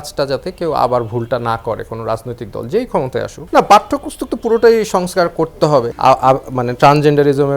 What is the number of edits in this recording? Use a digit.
2